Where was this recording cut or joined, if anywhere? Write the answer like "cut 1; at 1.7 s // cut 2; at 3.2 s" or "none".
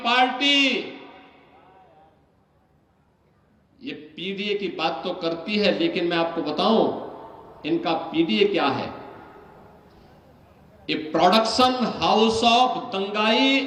none